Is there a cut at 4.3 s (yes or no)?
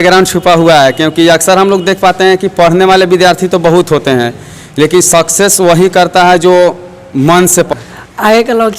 no